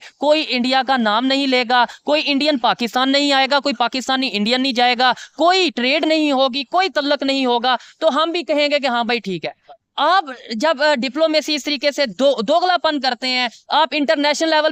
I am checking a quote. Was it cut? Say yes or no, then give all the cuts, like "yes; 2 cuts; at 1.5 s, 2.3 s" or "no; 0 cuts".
no; 0 cuts